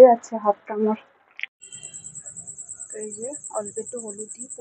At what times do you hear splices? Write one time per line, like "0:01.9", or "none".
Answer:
0:01.5